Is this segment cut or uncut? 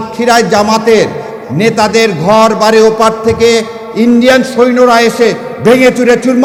uncut